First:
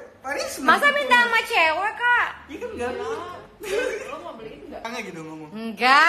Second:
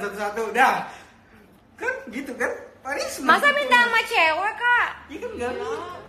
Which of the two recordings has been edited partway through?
first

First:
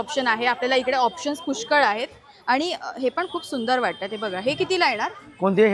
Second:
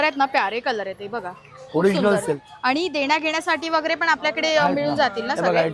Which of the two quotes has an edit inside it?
second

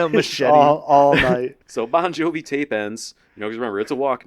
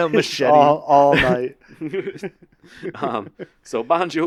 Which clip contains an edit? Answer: first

